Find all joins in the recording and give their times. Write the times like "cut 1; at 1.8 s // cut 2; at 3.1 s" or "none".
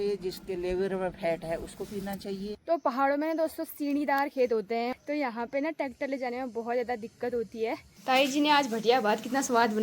cut 1; at 2.6 s // cut 2; at 4.9 s // cut 3; at 7.9 s